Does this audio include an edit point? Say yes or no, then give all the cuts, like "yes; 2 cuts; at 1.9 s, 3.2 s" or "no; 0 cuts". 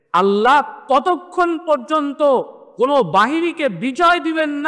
yes; 1 cut; at 2.6 s